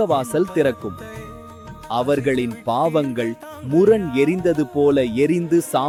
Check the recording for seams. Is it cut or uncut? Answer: uncut